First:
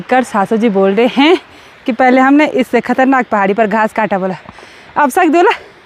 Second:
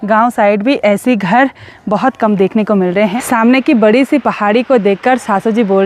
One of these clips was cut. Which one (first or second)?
second